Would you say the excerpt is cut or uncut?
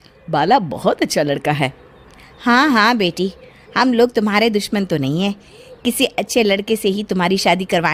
uncut